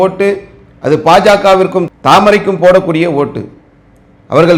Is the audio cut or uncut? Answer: uncut